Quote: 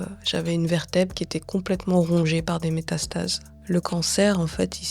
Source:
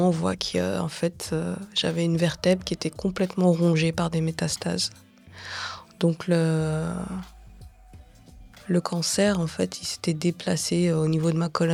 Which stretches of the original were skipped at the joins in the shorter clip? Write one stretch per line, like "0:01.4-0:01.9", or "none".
0:05.0-0:08.5

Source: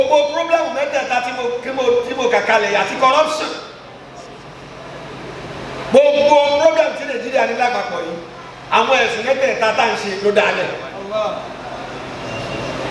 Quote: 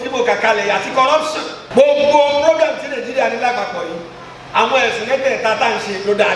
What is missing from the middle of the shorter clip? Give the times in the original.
0:03.6-0:05.7

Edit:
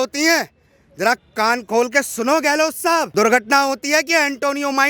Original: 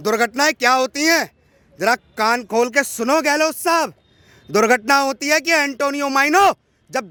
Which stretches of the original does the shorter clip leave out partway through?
0:03.9-0:04.5

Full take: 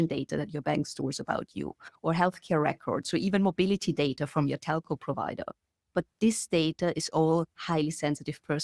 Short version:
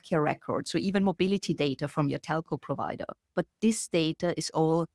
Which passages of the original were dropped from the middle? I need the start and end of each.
0:05.5-0:05.7

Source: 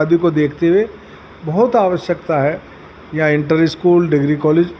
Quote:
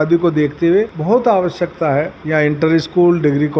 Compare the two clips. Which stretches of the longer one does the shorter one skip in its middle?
0:01.0-0:01.4
0:02.6-0:03.1

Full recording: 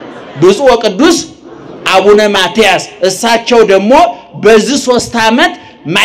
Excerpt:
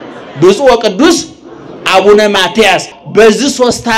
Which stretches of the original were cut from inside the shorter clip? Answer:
0:02.9-0:04.2

